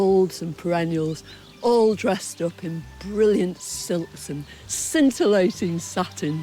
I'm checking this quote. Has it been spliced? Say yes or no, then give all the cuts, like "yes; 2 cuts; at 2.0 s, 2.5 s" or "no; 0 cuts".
no; 0 cuts